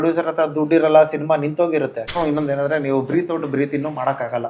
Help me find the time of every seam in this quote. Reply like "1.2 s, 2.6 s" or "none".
2.1 s